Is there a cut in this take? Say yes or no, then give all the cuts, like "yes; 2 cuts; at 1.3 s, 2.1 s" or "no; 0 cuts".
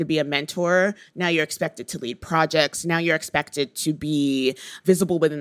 no; 0 cuts